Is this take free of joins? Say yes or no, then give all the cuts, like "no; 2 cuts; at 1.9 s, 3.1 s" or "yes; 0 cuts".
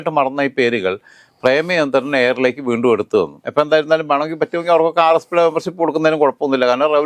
yes; 0 cuts